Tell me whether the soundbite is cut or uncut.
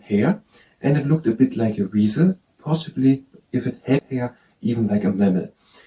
cut